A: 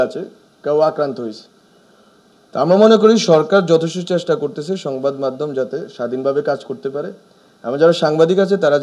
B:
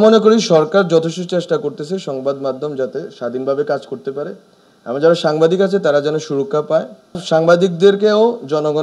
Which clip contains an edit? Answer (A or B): B